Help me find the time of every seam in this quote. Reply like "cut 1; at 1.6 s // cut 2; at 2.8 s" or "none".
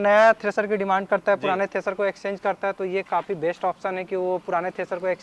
none